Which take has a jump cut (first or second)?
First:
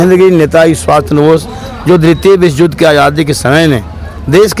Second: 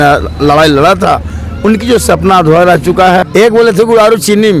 second